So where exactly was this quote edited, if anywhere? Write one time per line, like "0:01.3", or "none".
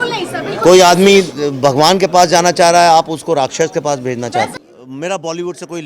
0:04.5